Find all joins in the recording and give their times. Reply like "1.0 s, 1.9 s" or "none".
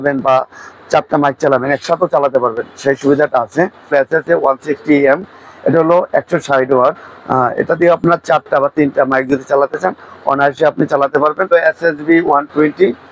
3.9 s, 7.1 s, 11.5 s